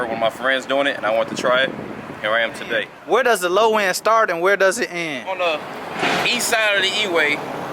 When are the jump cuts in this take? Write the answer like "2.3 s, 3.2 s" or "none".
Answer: 2.9 s, 5.3 s